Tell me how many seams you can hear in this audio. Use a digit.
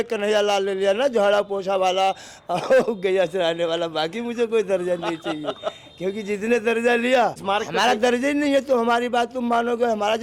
1